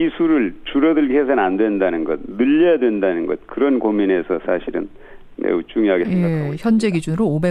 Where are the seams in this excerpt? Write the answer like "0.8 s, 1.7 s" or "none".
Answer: none